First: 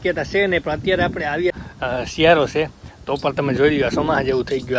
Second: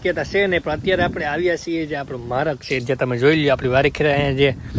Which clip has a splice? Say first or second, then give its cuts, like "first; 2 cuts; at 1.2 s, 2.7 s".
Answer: first; 1 cut; at 1.5 s